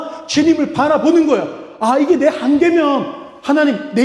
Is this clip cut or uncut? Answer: uncut